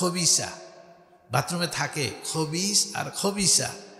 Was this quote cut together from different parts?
no; 0 cuts

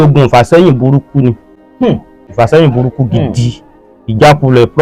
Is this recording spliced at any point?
yes; 1 cut; at 2.2 s

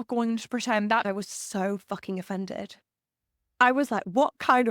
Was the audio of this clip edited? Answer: yes; 1 cut; at 1.0 s

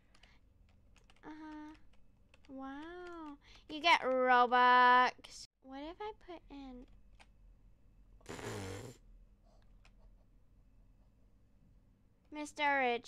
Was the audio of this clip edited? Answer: yes; 1 cut; at 5.3 s

